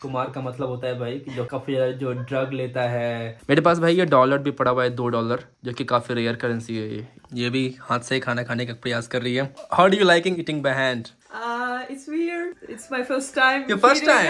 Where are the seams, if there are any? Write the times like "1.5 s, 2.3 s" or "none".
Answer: 1.5 s, 3.3 s, 7.1 s, 9.6 s, 12.6 s